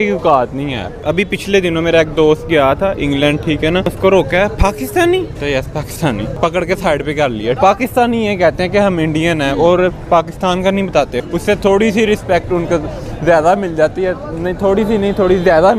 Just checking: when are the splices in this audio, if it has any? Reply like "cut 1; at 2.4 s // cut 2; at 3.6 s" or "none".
cut 1; at 1.0 s // cut 2; at 3.9 s // cut 3; at 5.3 s // cut 4; at 6.3 s // cut 5; at 7.6 s // cut 6; at 11.2 s